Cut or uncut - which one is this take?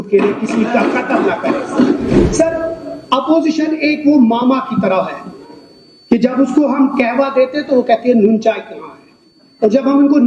cut